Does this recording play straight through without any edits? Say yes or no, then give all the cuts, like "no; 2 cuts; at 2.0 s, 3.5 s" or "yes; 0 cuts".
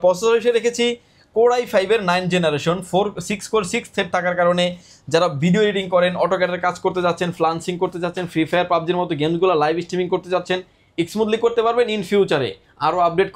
yes; 0 cuts